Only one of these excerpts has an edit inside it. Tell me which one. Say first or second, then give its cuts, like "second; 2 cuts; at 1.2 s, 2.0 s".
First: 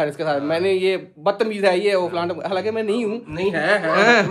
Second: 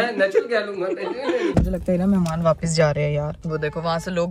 second; 2 cuts; at 1.5 s, 3.4 s